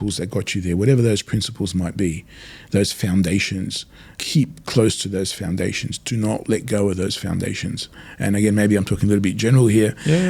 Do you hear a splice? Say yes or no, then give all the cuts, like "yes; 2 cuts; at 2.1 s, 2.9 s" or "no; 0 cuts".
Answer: yes; 1 cut; at 4.1 s